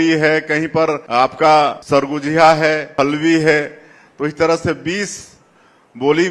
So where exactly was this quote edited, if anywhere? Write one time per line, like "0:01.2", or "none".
0:01.0
0:01.8
0:02.9